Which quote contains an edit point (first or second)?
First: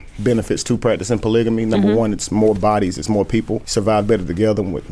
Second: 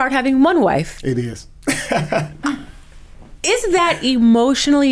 first